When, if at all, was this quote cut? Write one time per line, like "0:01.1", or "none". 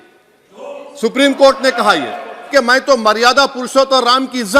0:02.5